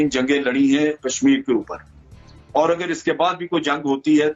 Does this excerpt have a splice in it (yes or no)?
no